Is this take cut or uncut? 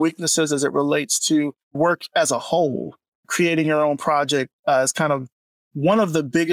cut